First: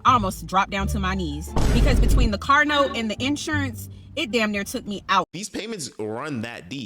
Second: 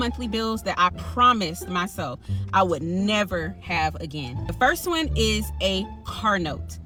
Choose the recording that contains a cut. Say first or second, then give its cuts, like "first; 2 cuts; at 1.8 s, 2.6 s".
first; 1 cut; at 5.4 s